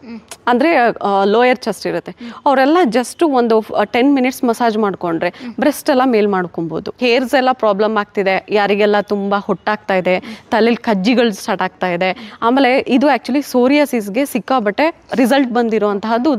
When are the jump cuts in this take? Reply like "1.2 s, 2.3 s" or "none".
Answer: 7.0 s